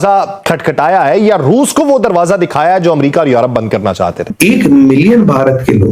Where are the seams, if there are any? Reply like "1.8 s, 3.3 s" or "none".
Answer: 4.3 s